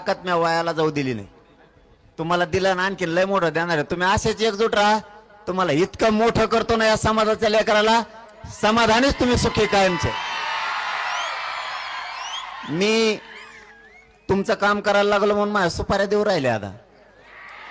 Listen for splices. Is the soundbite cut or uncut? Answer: uncut